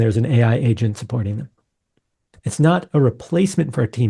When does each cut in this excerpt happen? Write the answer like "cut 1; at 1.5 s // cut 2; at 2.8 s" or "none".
none